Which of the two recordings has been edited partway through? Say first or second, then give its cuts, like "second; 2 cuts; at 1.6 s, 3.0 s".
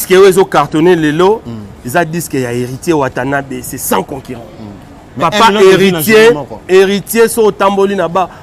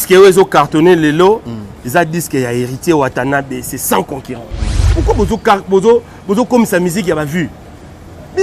second; 1 cut; at 4.8 s